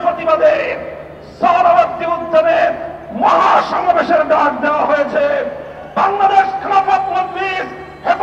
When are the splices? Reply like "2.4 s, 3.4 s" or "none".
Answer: none